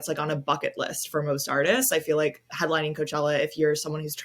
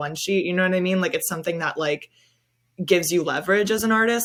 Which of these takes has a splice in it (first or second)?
first